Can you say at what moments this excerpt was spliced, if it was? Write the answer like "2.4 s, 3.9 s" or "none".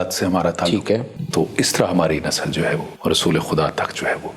1.2 s, 2.9 s